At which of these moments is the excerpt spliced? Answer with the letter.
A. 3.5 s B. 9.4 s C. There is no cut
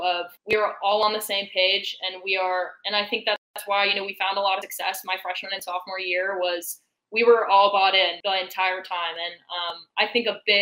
C